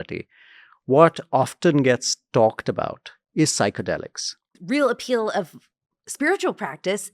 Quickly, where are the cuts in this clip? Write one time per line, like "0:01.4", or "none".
0:04.5